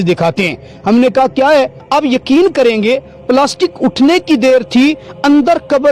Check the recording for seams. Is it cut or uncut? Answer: cut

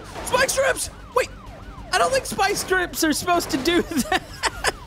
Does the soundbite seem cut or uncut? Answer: uncut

